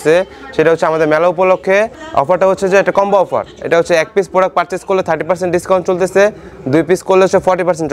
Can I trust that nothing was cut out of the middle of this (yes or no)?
no